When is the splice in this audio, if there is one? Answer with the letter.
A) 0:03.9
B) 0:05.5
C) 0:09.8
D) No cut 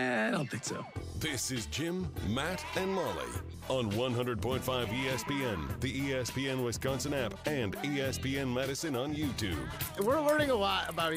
C